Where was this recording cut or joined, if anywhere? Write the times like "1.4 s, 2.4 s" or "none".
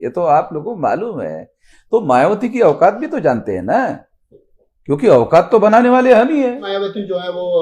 6.7 s

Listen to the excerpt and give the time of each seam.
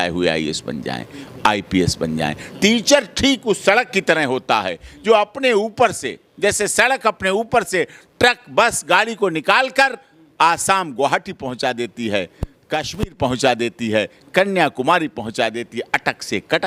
none

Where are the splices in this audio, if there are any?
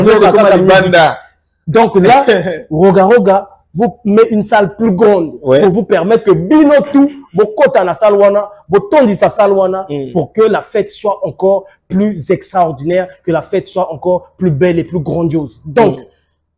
none

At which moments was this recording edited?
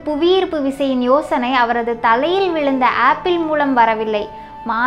none

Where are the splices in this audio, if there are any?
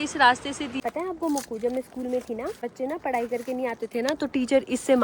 0.8 s, 2.6 s

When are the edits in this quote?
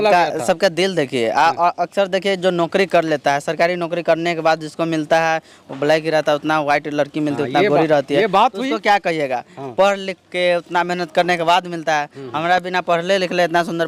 none

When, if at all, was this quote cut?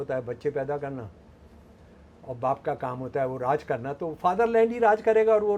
none

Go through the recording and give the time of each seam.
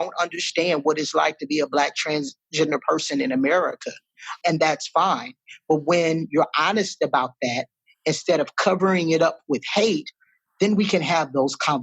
4.4 s

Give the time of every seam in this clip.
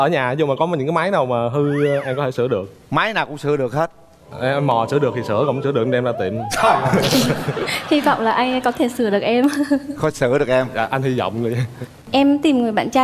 12.0 s

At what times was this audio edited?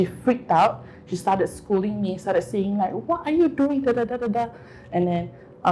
none

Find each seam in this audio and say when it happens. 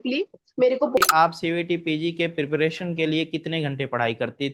1.0 s

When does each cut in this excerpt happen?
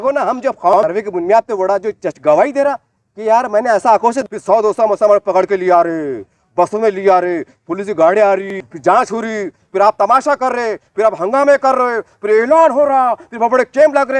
0.8 s, 4.2 s, 8.7 s

